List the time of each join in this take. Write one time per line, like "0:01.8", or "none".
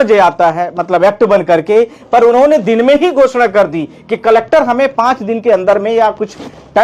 none

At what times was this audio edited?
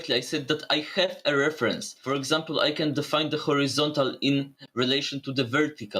0:01.9

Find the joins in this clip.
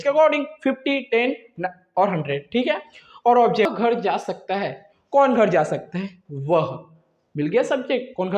0:03.7

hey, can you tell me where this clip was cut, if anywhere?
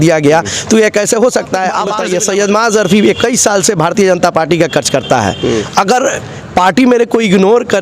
0:01.9

